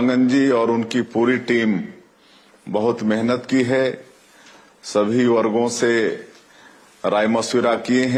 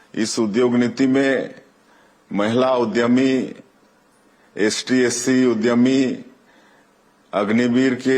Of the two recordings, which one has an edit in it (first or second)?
second